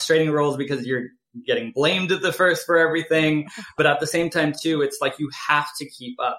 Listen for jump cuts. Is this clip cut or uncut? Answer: cut